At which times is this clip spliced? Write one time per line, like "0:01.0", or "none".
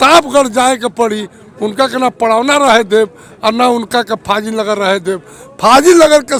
none